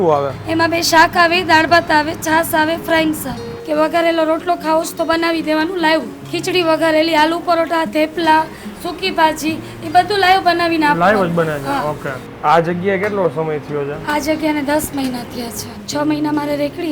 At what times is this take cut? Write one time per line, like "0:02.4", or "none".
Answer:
0:03.6
0:06.2
0:12.1
0:15.7

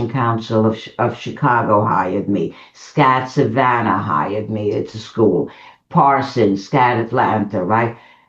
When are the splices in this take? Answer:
none

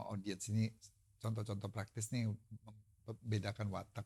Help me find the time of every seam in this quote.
none

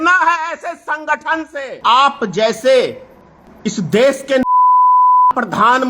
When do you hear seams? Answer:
0:01.8

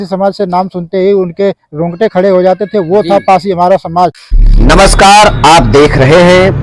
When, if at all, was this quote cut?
0:04.2

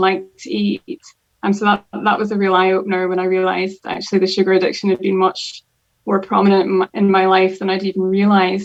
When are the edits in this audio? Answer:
none

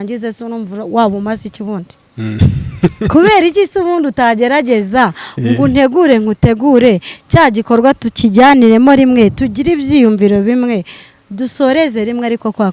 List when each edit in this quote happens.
none

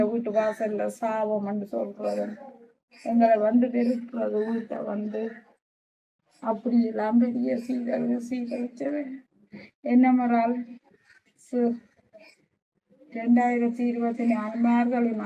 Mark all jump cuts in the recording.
none

